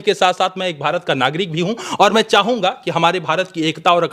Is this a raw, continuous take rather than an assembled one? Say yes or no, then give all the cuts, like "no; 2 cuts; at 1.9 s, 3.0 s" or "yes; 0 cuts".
yes; 0 cuts